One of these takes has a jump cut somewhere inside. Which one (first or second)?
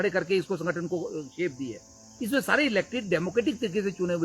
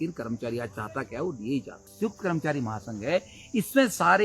second